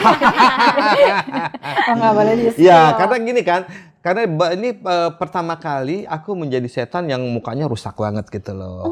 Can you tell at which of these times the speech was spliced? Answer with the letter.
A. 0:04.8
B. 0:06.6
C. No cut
C